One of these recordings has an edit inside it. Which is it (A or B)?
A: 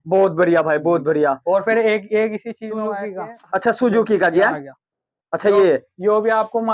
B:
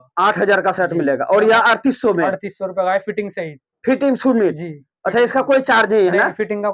A